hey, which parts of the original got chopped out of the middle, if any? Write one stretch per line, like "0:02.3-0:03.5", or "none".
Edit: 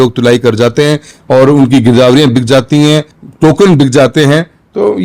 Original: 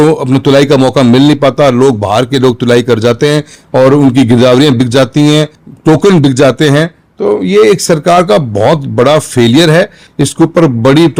none